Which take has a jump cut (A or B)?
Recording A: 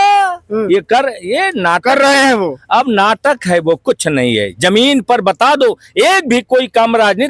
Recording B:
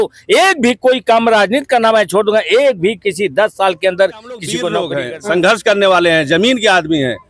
B